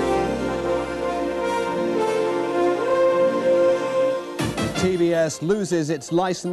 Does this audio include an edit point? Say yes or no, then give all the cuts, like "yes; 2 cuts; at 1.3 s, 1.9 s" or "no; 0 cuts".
no; 0 cuts